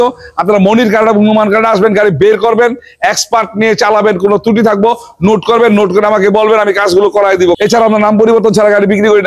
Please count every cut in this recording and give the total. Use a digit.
1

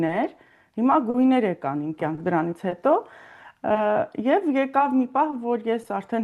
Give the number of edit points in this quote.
0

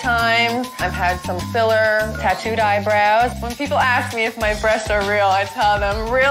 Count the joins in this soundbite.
0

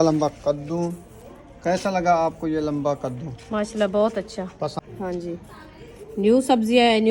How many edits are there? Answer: 1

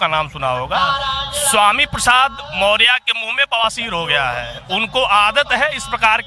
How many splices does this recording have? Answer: 0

